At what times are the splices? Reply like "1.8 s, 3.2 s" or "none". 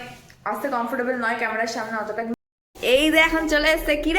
2.3 s